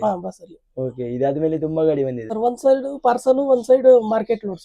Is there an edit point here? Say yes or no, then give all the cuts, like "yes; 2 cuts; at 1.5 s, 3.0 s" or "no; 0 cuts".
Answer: yes; 1 cut; at 2.3 s